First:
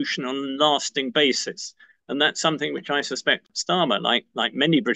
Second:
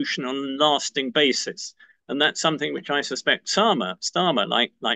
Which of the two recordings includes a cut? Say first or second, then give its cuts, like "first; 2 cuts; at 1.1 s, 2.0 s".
first; 1 cut; at 3.5 s